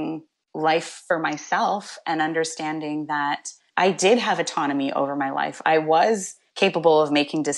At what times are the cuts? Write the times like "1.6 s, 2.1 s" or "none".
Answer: 3.6 s